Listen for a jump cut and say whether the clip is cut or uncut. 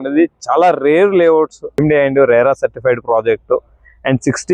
cut